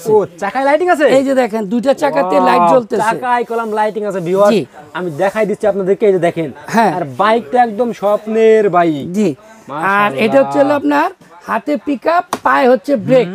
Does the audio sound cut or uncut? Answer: uncut